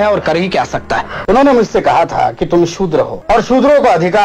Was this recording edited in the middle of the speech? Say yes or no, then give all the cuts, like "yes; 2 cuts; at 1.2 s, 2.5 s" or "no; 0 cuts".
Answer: yes; 2 cuts; at 1.1 s, 3.2 s